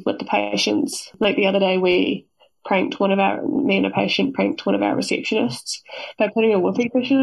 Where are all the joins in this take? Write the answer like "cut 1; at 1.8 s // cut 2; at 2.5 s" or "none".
none

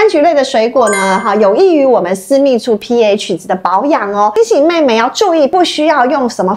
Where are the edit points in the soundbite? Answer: cut 1; at 4.4 s // cut 2; at 5.5 s

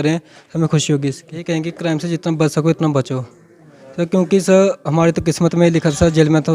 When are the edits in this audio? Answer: cut 1; at 1.4 s

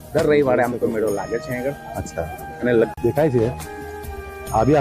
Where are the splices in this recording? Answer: cut 1; at 2.9 s

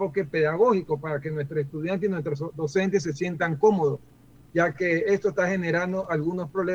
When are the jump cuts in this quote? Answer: none

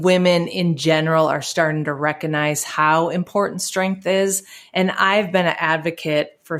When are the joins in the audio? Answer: none

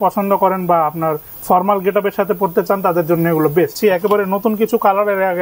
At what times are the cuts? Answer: cut 1; at 3.7 s

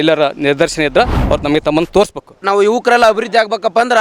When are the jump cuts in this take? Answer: cut 1; at 2.3 s

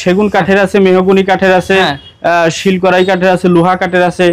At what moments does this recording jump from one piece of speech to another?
none

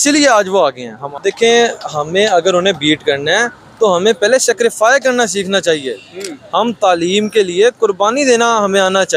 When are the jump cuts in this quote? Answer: cut 1; at 1.0 s

